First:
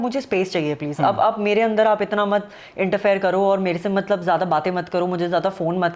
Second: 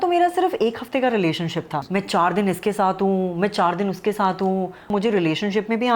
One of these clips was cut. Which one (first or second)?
second